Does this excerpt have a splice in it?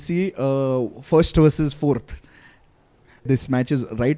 yes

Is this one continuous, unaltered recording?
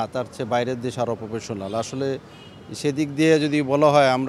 yes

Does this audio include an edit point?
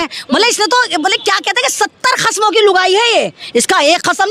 no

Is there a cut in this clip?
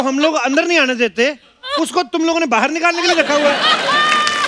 no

